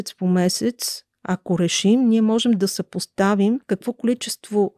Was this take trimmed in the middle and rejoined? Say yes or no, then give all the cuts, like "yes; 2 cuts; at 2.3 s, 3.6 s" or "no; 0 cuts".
yes; 1 cut; at 3.6 s